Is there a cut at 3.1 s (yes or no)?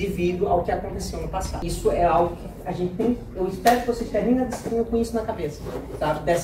no